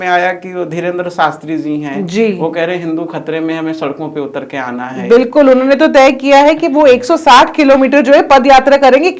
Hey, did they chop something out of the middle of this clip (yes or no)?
no